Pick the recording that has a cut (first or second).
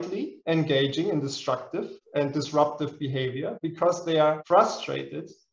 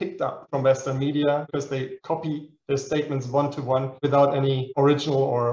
second